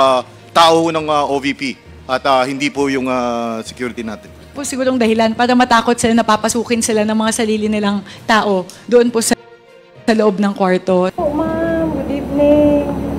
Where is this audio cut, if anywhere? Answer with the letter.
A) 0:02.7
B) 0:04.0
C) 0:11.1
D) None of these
C